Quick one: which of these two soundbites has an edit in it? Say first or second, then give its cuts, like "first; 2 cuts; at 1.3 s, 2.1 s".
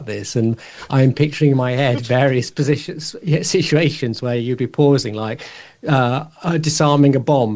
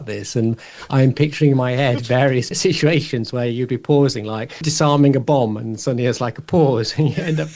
second; 2 cuts; at 2.5 s, 4.7 s